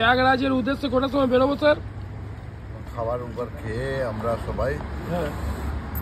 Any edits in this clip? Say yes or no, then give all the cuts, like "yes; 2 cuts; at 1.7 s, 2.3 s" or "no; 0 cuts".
no; 0 cuts